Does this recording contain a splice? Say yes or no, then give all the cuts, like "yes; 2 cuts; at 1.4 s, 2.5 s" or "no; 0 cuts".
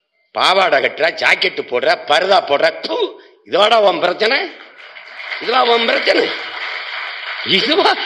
no; 0 cuts